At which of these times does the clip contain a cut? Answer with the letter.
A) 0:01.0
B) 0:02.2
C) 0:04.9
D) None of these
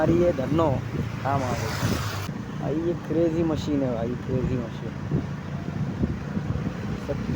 B